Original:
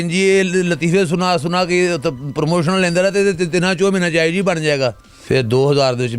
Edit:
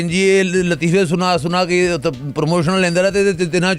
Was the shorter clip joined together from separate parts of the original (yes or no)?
no